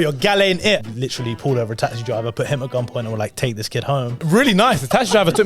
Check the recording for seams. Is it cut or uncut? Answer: cut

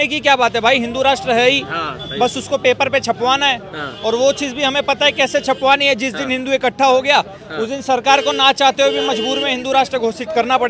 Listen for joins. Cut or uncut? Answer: uncut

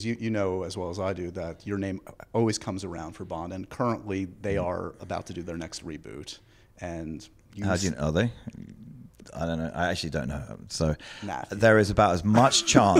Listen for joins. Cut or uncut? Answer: uncut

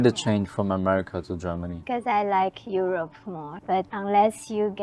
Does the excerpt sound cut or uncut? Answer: cut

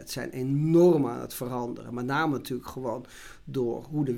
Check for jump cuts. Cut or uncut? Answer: uncut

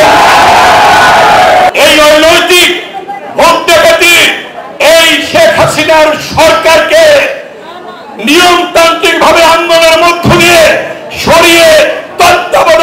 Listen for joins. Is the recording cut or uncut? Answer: cut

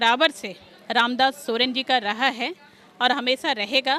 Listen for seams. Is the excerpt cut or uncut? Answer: uncut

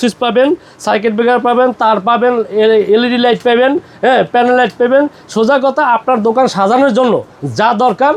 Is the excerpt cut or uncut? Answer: uncut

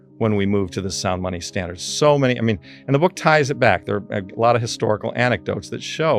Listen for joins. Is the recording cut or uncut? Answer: uncut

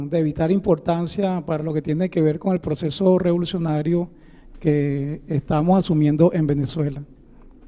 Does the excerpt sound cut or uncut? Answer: uncut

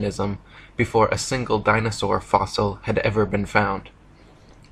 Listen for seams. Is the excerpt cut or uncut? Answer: cut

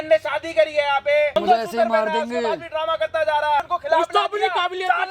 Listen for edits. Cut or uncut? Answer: cut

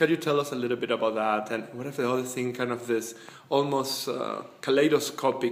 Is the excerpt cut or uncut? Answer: uncut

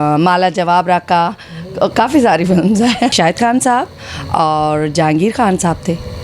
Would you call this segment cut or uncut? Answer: cut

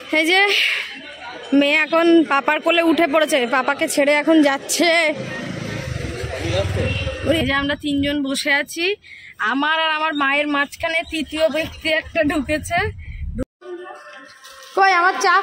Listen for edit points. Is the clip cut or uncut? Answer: cut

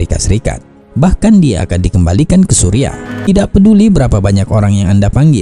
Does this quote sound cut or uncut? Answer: cut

